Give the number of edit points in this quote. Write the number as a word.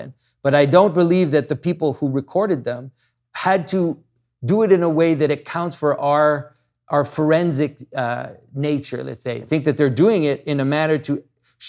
one